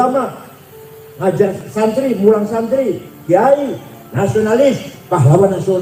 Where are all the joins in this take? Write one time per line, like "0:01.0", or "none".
none